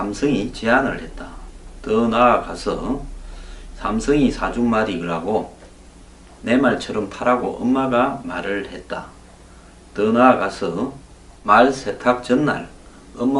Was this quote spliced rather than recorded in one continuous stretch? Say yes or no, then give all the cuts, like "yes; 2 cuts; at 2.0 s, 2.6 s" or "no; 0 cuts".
no; 0 cuts